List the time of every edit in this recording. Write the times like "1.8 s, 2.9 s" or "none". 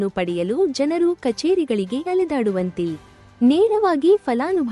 none